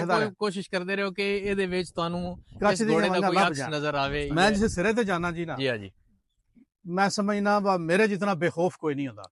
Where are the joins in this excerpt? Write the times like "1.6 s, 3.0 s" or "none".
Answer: 4.2 s